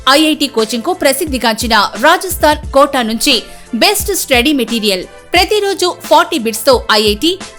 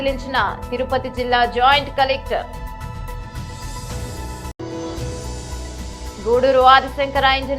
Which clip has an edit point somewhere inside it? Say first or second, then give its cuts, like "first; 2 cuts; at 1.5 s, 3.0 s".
second; 2 cuts; at 2.7 s, 4.5 s